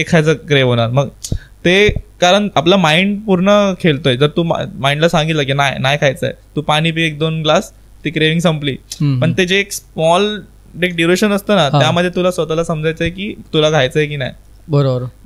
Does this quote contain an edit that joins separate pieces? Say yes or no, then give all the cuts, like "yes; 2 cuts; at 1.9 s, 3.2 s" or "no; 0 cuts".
no; 0 cuts